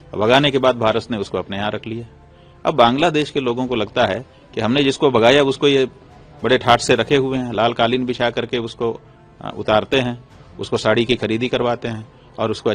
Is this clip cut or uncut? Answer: uncut